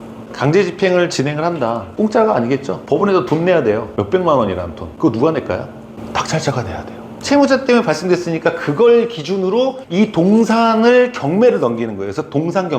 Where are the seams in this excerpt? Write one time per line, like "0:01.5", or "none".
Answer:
0:01.8
0:02.7
0:03.9
0:04.8
0:07.1
0:09.8